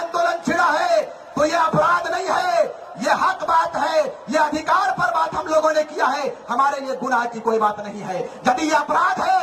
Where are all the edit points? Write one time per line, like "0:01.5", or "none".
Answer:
none